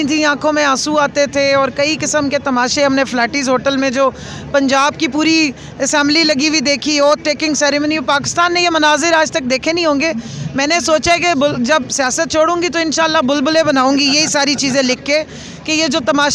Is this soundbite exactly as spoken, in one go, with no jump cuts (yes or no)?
yes